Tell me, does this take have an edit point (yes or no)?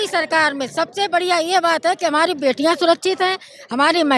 no